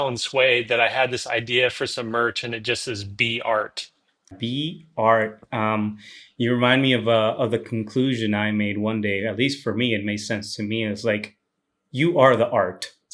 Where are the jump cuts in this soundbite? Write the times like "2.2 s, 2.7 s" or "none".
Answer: 4.4 s